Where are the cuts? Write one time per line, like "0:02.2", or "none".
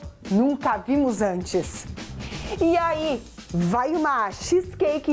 none

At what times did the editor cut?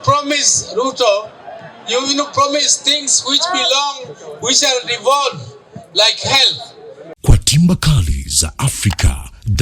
0:07.1

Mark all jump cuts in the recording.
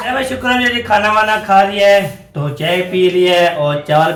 none

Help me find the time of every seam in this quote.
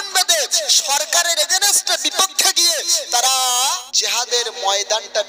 0:03.8

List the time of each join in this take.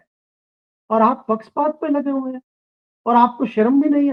none

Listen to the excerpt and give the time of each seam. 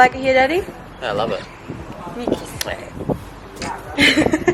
none

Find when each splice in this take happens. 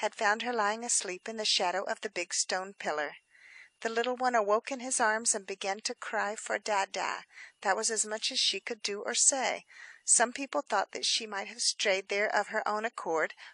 none

